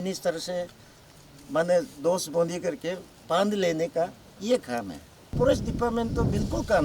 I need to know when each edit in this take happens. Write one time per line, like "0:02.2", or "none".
0:05.3